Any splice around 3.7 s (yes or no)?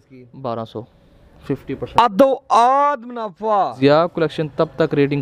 yes